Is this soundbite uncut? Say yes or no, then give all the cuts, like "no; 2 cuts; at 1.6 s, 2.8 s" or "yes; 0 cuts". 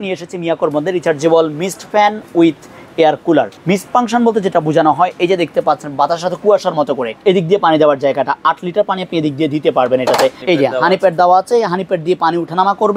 no; 3 cuts; at 3.6 s, 7.1 s, 10.4 s